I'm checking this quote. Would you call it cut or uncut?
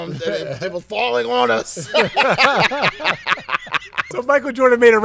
cut